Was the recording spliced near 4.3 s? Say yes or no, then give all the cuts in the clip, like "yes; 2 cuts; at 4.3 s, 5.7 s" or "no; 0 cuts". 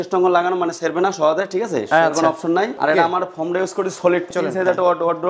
yes; 2 cuts; at 2.8 s, 4.3 s